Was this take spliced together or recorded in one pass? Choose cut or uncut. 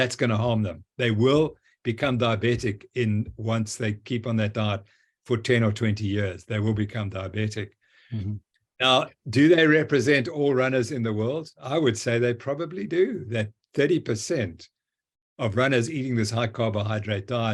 uncut